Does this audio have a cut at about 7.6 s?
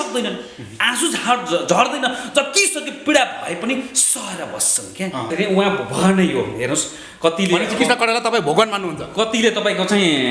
no; 1 cut; at 5.3 s

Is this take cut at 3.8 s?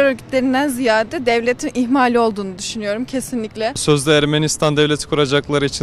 yes; 1 cut; at 3.8 s

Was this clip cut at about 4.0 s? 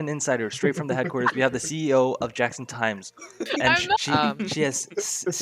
yes; 1 cut; at 4.0 s

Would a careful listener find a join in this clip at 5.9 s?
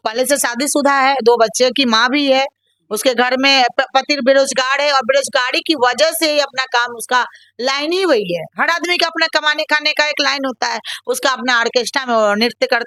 no; 0 cuts

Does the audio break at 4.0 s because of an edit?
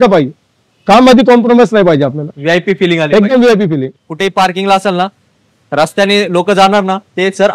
yes; 1 cut; at 4.0 s

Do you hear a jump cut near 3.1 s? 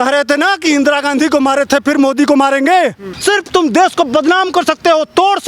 yes; 1 cut; at 3.1 s

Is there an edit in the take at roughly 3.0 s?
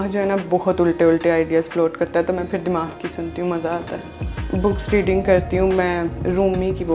no; 1 cut; at 4.4 s

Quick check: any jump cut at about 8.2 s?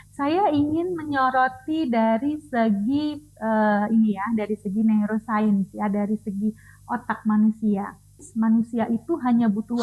yes; 1 cut; at 8.2 s

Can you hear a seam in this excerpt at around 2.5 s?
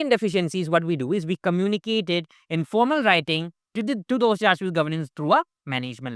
no; 0 cuts

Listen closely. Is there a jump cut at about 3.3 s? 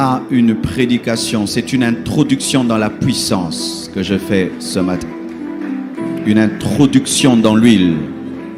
no; 0 cuts

